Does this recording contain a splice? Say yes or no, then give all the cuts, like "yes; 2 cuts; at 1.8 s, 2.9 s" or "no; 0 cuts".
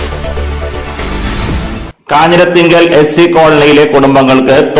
yes; 1 cut; at 1.9 s